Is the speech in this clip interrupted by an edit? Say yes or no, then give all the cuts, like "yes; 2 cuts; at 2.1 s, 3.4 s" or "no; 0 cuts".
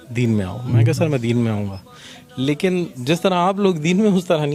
no; 0 cuts